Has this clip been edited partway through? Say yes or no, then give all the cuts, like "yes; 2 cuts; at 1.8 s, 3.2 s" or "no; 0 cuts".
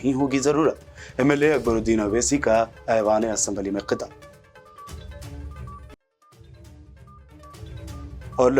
no; 0 cuts